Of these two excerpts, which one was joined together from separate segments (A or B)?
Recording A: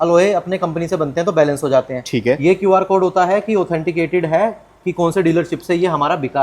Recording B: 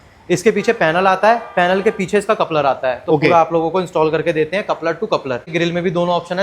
B